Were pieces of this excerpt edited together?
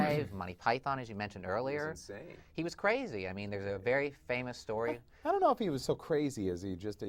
no; 0 cuts

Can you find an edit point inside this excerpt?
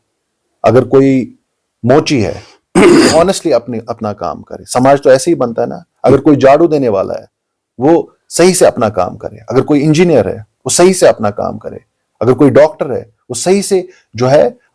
no; 0 cuts

